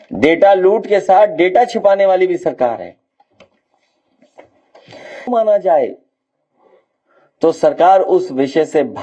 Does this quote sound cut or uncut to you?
cut